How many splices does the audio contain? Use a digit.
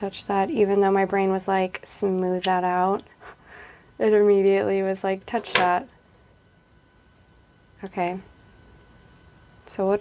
0